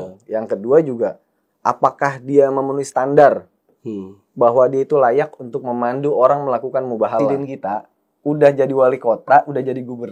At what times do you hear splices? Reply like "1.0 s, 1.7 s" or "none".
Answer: 7.4 s